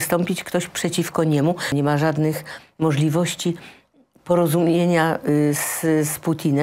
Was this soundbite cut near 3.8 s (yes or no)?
no